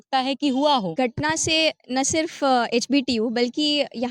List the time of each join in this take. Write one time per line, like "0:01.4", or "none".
0:00.9